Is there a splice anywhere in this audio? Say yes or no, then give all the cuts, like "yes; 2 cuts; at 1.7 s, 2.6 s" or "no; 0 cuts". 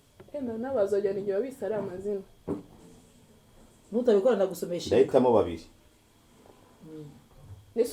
no; 0 cuts